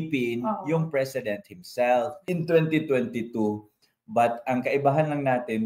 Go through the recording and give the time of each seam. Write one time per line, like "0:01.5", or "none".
0:02.2